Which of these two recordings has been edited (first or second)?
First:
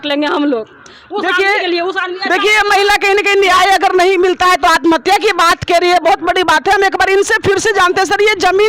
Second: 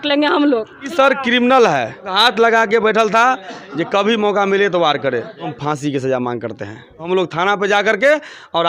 second